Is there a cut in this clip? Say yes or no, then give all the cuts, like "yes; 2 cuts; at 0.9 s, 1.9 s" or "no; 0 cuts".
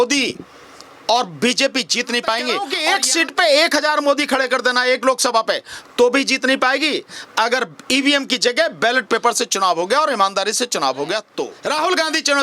yes; 2 cuts; at 2.7 s, 11.5 s